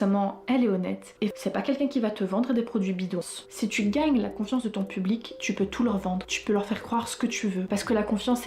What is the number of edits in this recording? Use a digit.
2